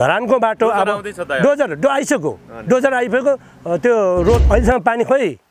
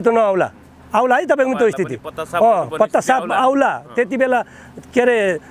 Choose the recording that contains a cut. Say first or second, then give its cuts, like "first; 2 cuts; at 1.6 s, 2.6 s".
first; 1 cut; at 4.4 s